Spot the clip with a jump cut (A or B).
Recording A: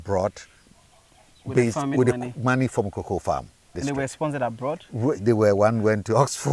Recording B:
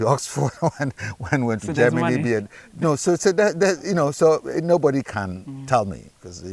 A